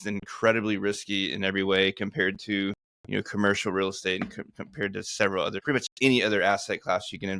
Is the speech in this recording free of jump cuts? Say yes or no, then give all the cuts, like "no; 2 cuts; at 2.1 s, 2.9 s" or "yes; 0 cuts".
no; 1 cut; at 5.6 s